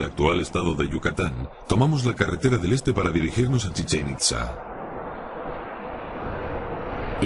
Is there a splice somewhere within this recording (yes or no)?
no